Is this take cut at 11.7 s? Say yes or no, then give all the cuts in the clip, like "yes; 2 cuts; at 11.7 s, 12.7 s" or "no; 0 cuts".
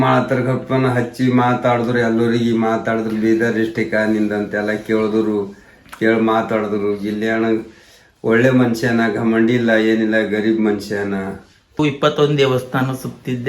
yes; 1 cut; at 11.7 s